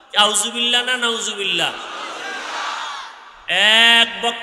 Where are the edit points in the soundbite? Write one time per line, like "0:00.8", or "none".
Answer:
0:03.4

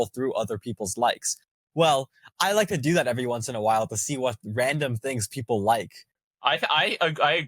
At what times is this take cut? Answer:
0:06.2

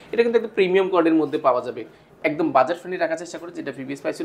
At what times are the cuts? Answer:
none

